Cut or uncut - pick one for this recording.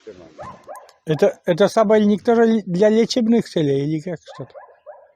uncut